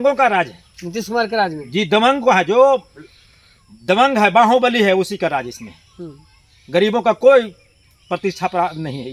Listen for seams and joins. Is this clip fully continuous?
yes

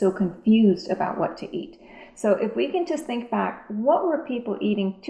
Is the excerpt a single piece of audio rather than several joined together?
yes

